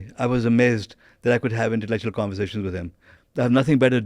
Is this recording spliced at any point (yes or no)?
yes